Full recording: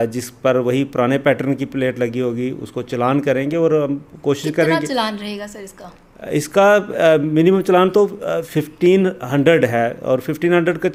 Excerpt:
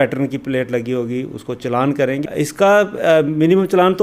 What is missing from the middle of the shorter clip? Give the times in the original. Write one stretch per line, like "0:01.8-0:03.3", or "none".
0:03.5-0:06.2